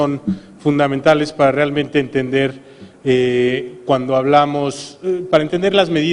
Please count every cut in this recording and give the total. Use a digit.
1